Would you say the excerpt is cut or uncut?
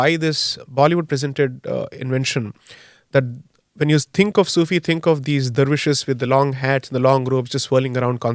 uncut